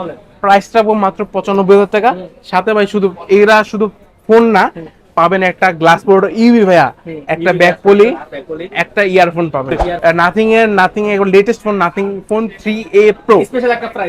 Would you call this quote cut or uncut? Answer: cut